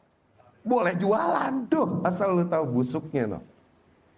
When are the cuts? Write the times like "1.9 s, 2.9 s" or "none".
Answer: 1.6 s